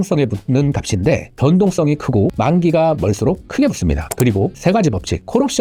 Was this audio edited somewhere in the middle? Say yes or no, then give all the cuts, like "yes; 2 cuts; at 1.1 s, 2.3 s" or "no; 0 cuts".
no; 0 cuts